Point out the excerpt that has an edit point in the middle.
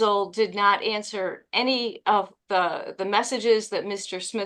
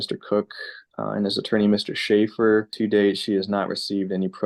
second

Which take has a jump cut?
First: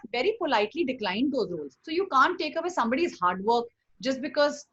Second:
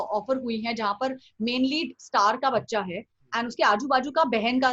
first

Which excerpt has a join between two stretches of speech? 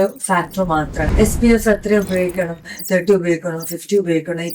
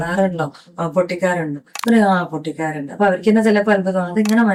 first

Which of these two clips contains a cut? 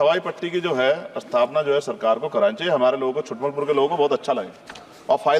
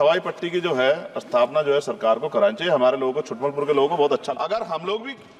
second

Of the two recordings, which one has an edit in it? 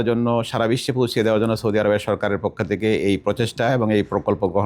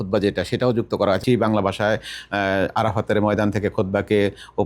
second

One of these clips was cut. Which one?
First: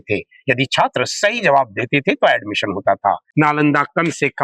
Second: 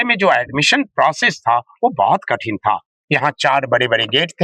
first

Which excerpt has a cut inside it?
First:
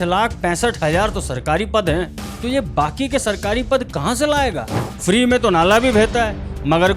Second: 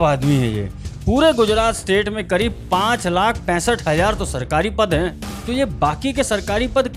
first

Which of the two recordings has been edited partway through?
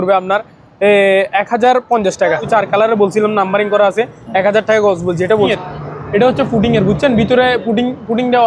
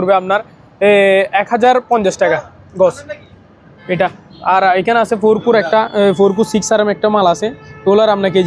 first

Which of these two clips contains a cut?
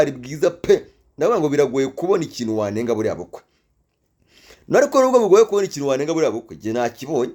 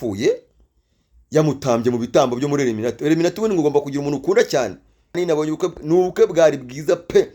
second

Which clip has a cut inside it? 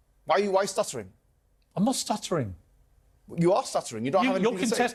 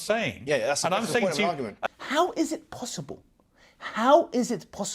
second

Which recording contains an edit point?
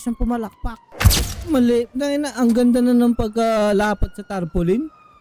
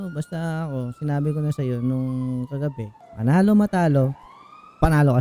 first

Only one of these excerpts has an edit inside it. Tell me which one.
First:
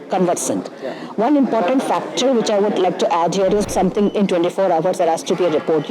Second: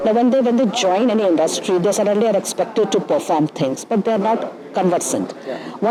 first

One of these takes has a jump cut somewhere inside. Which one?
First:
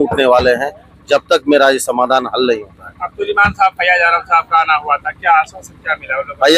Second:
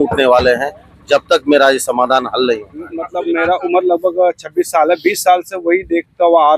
second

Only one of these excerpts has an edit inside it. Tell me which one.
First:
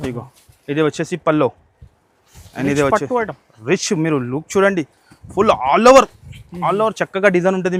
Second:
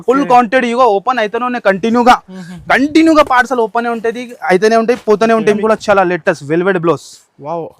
second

